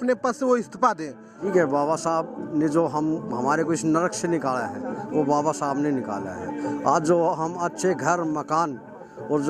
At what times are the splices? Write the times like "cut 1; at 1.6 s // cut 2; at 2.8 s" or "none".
cut 1; at 1.4 s